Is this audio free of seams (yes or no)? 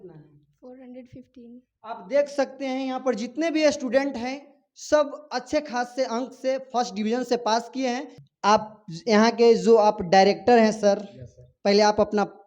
no